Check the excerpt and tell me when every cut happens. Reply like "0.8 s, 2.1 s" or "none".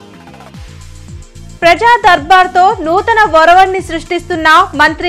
1.4 s